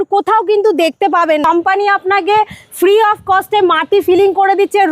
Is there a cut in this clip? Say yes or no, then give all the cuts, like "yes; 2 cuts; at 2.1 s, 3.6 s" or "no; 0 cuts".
yes; 1 cut; at 1.4 s